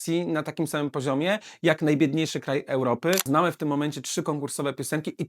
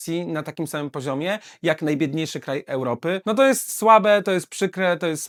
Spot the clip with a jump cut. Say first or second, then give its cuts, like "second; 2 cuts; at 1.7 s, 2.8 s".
first; 1 cut; at 3.2 s